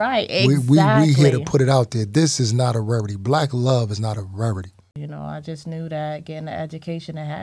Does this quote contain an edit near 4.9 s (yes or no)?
yes